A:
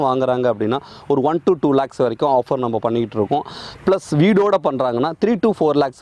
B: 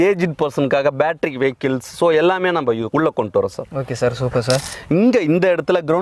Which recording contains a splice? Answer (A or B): B